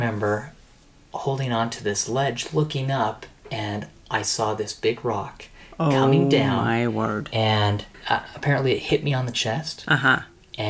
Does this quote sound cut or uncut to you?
cut